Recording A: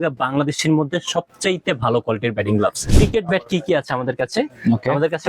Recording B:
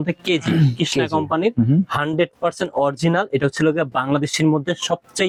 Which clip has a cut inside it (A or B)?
A